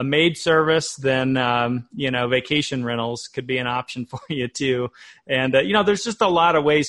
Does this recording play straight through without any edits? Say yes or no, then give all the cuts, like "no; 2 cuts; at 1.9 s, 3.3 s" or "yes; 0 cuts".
yes; 0 cuts